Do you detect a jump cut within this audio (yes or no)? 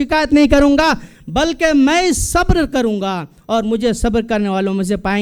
no